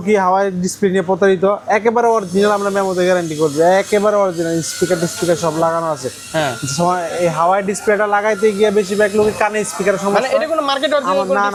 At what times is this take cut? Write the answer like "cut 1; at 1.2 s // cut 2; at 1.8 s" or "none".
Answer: none